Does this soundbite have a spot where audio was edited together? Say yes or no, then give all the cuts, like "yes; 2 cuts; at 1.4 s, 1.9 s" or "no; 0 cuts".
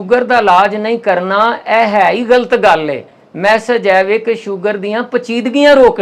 no; 0 cuts